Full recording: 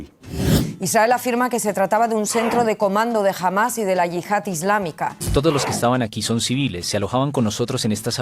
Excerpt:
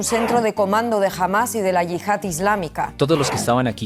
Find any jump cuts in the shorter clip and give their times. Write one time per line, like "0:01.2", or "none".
0:02.9

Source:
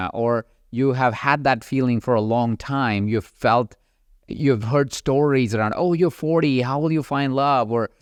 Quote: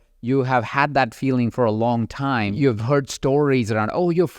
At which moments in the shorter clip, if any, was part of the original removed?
0:02.5

